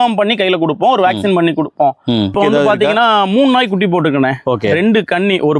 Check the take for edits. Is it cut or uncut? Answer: cut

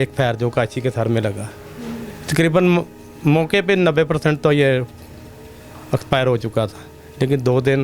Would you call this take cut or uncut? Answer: uncut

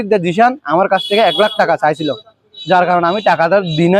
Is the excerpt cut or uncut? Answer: uncut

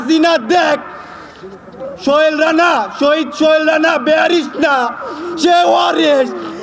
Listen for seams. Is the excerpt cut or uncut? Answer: uncut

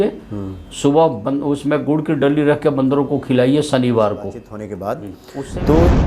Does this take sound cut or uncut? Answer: cut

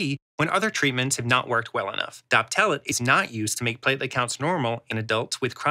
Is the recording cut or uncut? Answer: cut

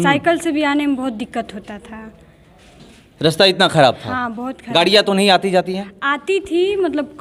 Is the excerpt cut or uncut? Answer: uncut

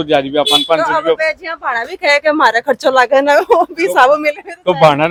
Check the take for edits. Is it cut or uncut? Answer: uncut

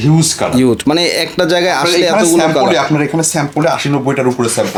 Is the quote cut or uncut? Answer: uncut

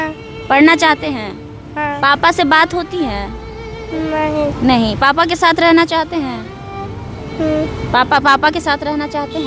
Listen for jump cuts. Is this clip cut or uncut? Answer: uncut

